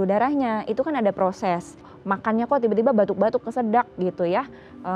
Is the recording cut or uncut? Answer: cut